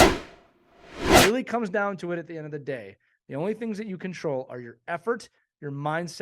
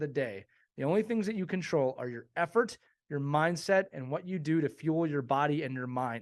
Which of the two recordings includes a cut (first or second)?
first